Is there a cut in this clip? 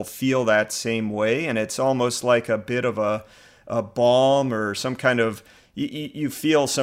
no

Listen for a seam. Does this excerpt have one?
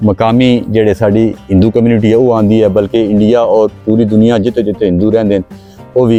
no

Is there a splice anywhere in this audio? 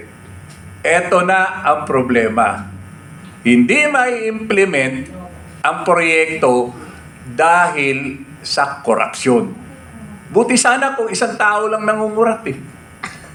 no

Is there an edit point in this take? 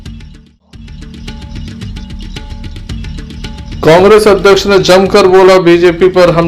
yes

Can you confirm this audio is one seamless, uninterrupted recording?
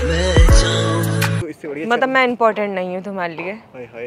no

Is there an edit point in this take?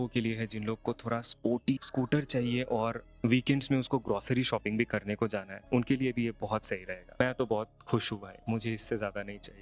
yes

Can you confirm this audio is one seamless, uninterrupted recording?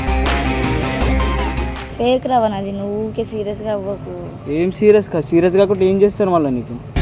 no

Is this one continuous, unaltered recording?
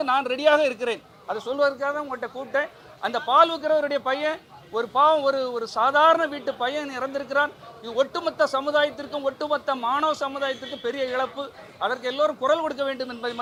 yes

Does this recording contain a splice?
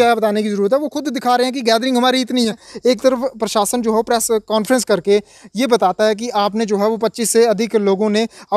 yes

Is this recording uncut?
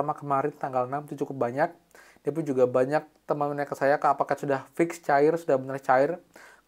yes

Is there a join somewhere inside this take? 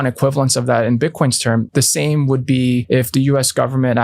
yes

